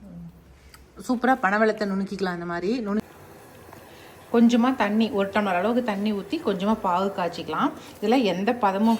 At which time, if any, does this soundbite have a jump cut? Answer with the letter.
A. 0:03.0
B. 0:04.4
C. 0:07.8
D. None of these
A